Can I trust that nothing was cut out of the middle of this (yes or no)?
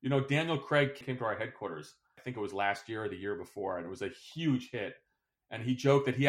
no